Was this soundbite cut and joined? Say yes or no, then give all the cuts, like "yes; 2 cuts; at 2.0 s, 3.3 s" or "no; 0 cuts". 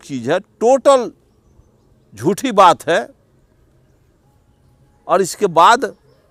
no; 0 cuts